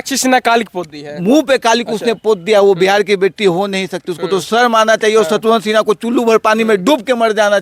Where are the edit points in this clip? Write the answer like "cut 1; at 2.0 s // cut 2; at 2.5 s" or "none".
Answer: none